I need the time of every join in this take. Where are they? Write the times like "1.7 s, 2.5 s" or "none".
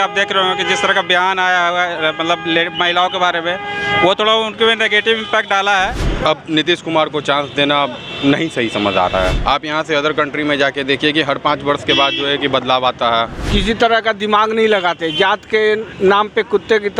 6.0 s, 9.4 s, 13.4 s